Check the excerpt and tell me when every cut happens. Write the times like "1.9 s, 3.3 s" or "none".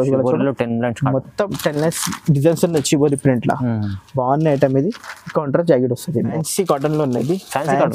6.4 s